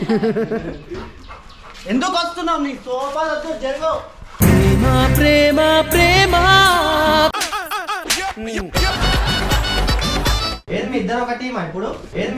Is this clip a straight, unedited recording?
no; 1 cut; at 10.5 s

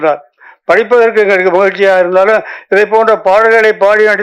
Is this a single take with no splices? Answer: yes; 0 cuts

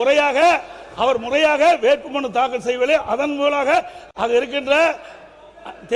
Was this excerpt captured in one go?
yes; 0 cuts

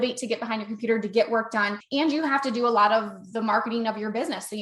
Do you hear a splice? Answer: yes; 1 cut; at 1.8 s

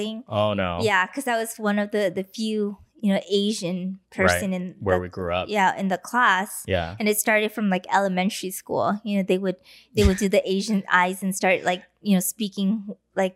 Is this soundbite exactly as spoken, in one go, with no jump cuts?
yes; 0 cuts

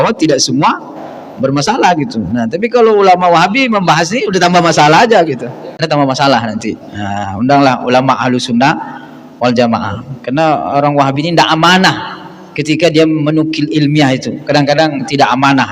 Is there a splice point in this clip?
yes; 1 cut; at 5.7 s

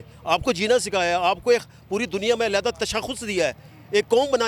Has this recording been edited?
no; 0 cuts

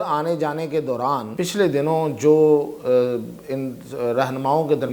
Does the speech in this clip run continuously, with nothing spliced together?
no; 1 cut; at 1.3 s

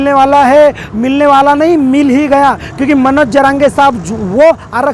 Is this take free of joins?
yes; 0 cuts

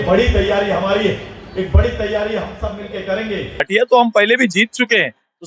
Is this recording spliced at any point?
yes; 1 cut; at 3.7 s

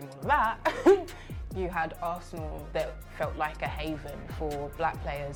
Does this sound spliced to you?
no; 0 cuts

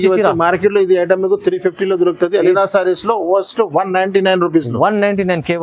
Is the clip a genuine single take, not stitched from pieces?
yes; 0 cuts

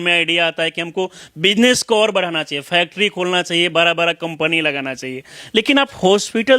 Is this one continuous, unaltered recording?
yes; 0 cuts

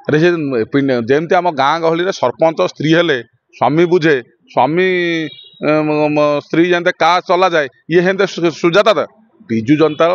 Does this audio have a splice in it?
no; 0 cuts

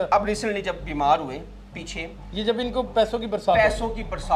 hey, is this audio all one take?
yes; 0 cuts

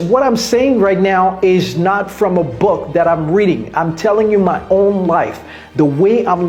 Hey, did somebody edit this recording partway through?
no; 0 cuts

